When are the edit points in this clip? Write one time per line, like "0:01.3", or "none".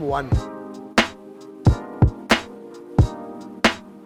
none